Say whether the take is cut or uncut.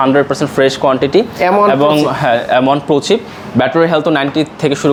uncut